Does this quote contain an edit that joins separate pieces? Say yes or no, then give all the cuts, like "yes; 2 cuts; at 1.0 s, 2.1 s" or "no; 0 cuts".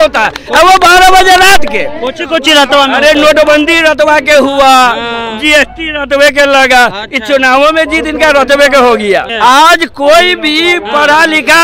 yes; 1 cut; at 9.3 s